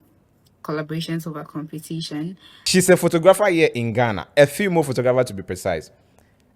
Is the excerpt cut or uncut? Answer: cut